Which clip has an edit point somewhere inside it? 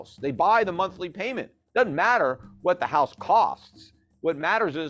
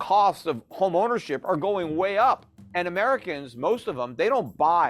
second; 1 cut; at 2.6 s

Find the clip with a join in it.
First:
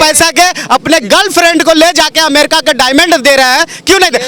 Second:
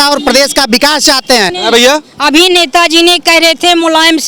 second; 1 cut; at 1.5 s

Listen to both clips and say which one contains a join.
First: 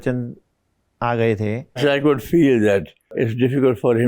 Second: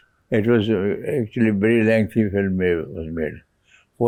first; 2 cuts; at 1.8 s, 3.1 s

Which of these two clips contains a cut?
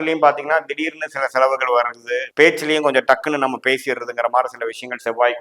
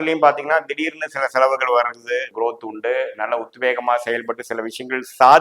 second; 1 cut; at 2.3 s

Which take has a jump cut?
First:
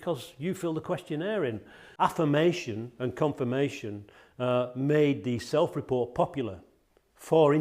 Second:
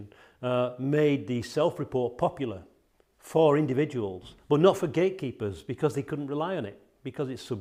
first; 1 cut; at 1.8 s

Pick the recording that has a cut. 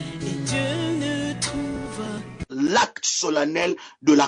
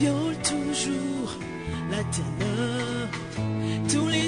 first; 1 cut; at 2.5 s

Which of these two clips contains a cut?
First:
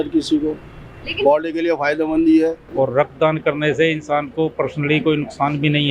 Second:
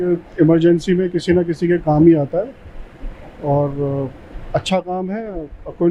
first; 1 cut; at 2.6 s

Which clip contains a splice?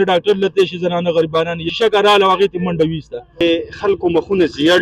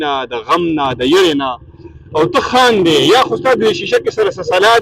first; 2 cuts; at 1.7 s, 3.4 s

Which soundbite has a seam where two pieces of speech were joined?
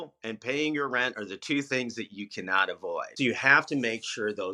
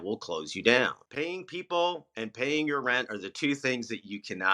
second; 1 cut; at 1.0 s

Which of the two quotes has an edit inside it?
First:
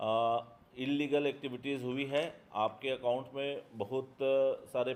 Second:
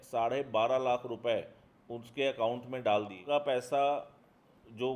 second; 1 cut; at 3.2 s

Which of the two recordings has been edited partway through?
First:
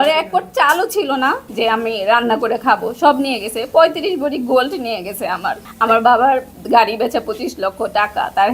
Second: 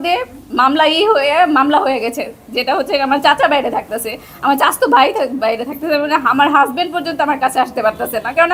first; 2 cuts; at 1.5 s, 5.7 s

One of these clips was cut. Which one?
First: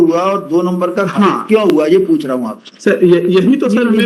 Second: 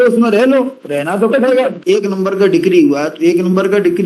second; 1 cut; at 1.8 s

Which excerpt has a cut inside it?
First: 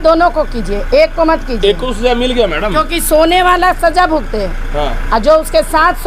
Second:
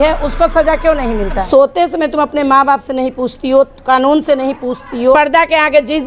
second; 2 cuts; at 1.3 s, 5.1 s

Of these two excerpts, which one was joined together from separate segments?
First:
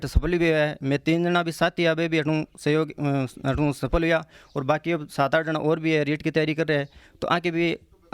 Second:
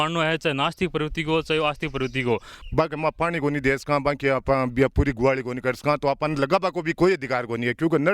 second; 1 cut; at 2.5 s

